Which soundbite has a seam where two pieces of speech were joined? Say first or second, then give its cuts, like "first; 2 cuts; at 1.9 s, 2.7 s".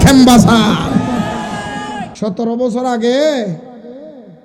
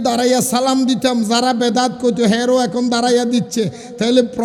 first; 1 cut; at 2.1 s